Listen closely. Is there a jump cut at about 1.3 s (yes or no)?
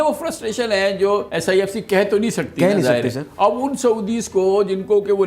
yes